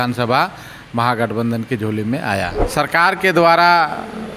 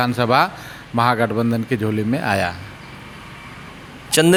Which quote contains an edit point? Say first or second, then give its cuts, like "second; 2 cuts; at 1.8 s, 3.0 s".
first; 1 cut; at 2.6 s